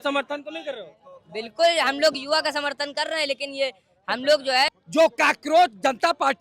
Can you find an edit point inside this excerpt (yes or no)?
yes